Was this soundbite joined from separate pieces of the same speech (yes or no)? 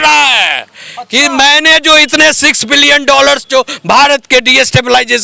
no